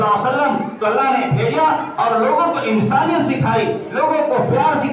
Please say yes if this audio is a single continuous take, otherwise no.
yes